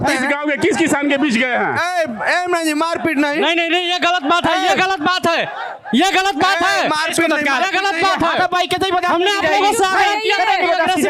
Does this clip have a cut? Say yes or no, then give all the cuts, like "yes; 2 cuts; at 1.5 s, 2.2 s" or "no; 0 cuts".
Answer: no; 0 cuts